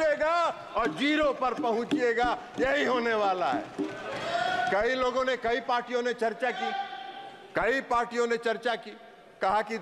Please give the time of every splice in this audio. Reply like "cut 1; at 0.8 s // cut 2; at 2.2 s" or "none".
none